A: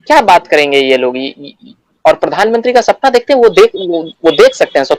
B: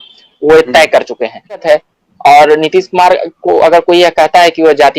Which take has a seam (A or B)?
B